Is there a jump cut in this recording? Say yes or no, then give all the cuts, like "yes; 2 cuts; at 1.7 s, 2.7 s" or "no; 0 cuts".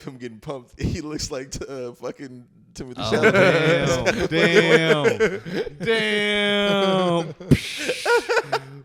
no; 0 cuts